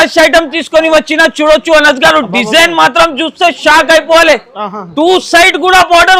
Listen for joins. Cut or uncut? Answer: uncut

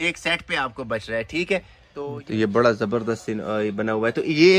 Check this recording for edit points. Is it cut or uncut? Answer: cut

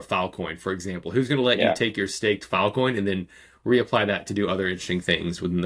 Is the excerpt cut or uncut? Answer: uncut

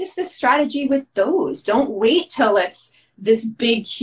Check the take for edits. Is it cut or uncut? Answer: uncut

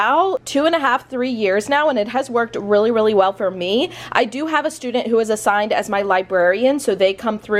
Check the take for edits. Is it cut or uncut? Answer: uncut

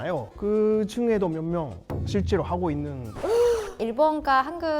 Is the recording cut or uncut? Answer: cut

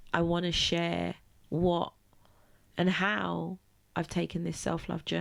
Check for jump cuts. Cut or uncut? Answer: uncut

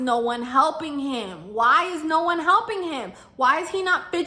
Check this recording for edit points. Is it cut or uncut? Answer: uncut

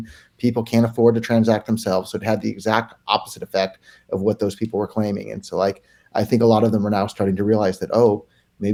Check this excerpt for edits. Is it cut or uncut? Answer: uncut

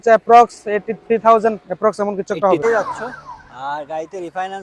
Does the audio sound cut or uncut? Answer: cut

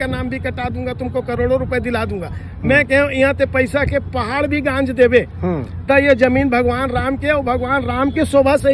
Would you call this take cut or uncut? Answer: uncut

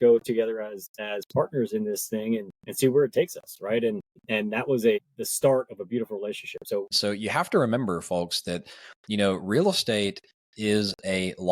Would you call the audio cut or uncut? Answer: cut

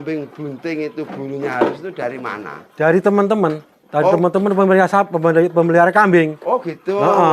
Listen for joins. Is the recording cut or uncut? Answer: cut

